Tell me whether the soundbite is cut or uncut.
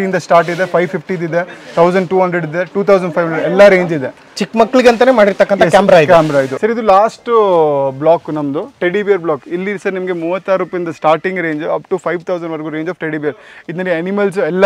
cut